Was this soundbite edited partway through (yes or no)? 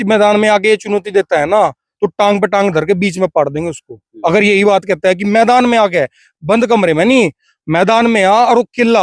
no